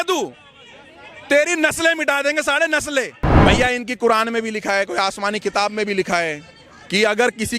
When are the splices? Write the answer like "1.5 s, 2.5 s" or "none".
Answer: 3.3 s